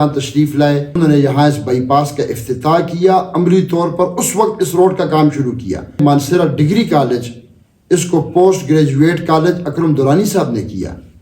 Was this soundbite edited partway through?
yes; 2 cuts; at 0.9 s, 6.0 s

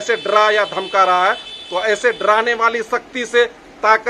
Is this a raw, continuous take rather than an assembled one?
yes; 0 cuts

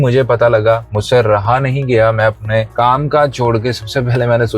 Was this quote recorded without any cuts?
no; 2 cuts; at 0.9 s, 2.7 s

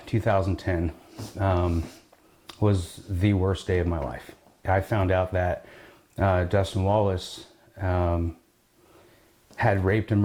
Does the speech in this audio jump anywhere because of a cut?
no; 0 cuts

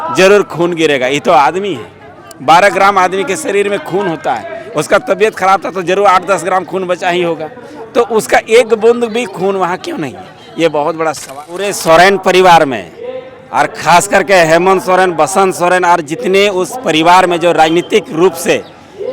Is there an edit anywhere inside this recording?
yes; 1 cut; at 11.7 s

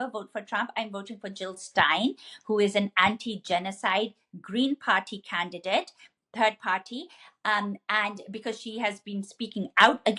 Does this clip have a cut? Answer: no; 0 cuts

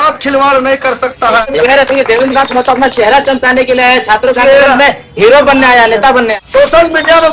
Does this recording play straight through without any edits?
no; 2 cuts; at 1.5 s, 6.3 s

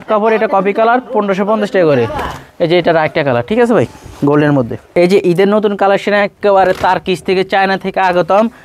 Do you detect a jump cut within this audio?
no; 0 cuts

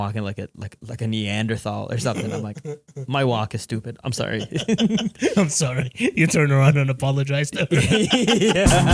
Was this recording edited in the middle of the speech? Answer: no; 0 cuts

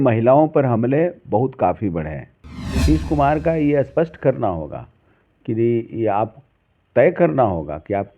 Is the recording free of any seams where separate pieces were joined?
no; 1 cut; at 2.8 s

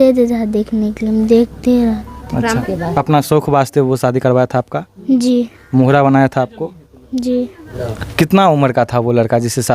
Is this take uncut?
no; 2 cuts; at 2.6 s, 7.6 s

